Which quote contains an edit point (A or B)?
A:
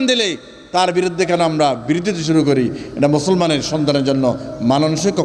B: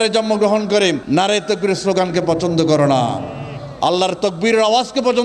B